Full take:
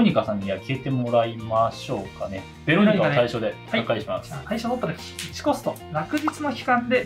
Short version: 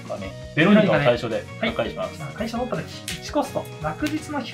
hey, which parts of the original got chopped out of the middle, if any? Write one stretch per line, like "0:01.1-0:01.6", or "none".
none